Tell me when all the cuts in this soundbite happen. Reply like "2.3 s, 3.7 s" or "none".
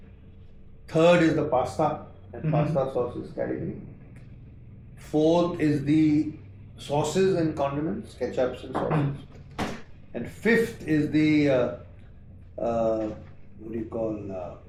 none